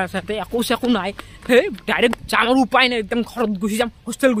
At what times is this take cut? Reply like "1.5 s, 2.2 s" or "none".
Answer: none